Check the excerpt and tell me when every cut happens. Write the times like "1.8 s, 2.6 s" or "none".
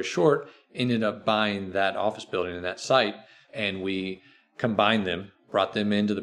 3.4 s